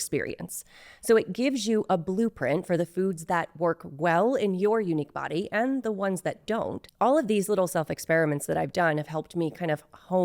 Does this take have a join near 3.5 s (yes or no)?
no